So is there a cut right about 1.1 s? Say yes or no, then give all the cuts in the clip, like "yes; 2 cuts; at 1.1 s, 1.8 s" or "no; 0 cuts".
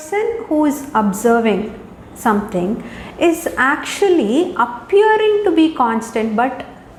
no; 0 cuts